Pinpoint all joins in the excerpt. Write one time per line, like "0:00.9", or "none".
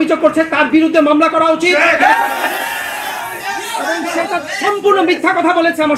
none